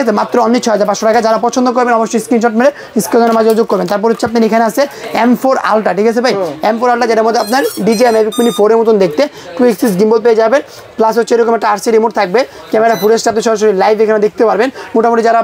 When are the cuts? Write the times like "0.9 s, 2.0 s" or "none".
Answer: none